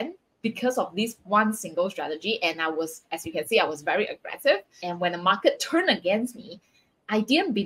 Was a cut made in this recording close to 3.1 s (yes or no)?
no